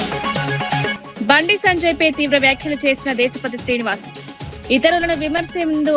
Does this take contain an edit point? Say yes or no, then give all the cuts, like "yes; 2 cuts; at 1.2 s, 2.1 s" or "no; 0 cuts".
yes; 1 cut; at 1.0 s